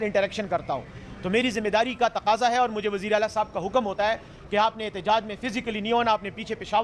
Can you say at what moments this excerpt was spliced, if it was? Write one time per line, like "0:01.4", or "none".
none